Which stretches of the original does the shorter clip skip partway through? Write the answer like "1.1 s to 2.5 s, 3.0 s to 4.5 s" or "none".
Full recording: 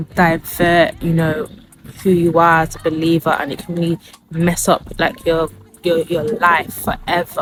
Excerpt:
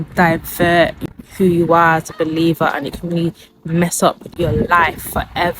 1.0 s to 1.6 s, 5.0 s to 6.0 s